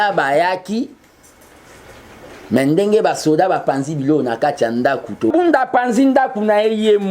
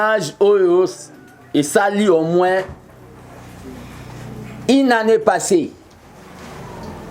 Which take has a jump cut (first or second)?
first